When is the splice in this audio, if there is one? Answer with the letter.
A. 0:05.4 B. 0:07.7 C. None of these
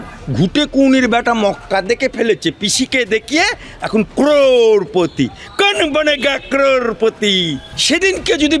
B